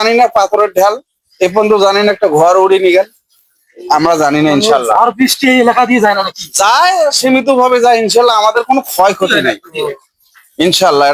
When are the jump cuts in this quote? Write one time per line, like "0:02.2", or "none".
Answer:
none